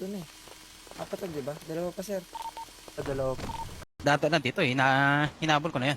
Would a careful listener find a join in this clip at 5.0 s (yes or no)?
no